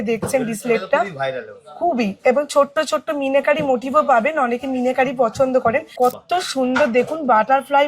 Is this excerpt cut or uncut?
cut